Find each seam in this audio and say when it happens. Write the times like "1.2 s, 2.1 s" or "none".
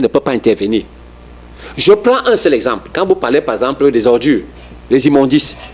none